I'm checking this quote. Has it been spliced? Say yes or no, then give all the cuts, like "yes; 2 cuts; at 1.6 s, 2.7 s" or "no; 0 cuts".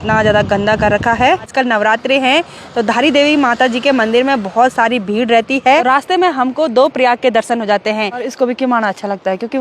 yes; 3 cuts; at 1.4 s, 5.8 s, 8.3 s